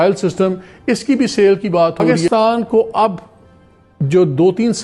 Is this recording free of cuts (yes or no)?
no